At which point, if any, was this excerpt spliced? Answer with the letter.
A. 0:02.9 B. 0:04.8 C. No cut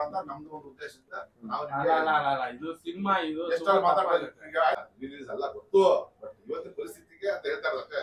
B